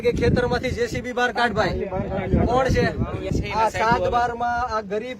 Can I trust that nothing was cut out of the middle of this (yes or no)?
no